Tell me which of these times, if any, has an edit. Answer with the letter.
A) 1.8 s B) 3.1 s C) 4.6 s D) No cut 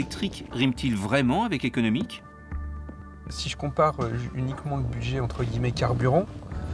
A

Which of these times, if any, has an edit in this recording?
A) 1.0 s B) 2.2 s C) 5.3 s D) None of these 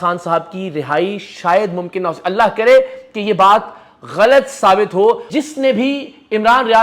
C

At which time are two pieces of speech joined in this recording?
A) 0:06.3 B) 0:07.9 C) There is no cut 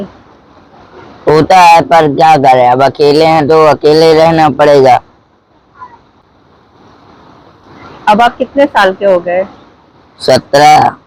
C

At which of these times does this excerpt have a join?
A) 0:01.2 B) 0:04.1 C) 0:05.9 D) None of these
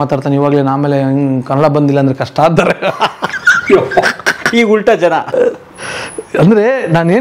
D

